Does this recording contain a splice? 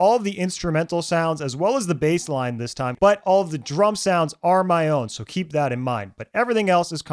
yes; 1 cut; at 2.9 s

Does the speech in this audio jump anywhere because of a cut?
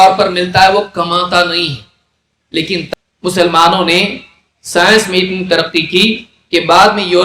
yes; 1 cut; at 2.8 s

